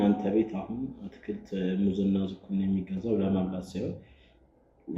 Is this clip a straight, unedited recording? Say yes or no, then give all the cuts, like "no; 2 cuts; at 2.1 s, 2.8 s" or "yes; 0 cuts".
yes; 0 cuts